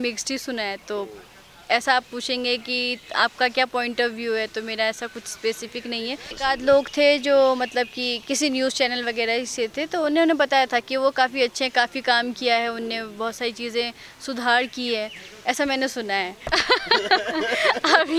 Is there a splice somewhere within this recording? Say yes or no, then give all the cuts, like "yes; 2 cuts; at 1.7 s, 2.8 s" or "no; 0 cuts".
yes; 2 cuts; at 6.3 s, 16.4 s